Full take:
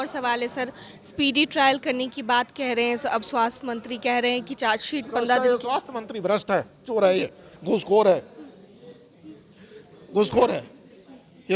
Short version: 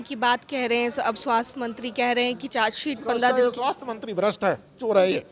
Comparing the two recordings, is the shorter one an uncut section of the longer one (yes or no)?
yes